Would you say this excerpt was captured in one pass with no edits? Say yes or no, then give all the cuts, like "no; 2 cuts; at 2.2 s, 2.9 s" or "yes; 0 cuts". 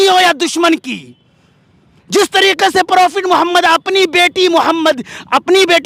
yes; 0 cuts